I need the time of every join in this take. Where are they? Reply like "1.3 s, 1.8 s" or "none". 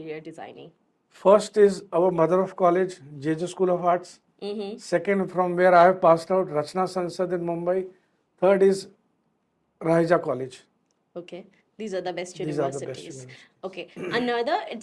none